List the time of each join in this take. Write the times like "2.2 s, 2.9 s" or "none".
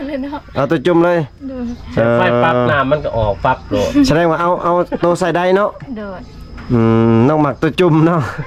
none

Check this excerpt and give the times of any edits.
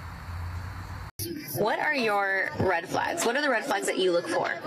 1.2 s

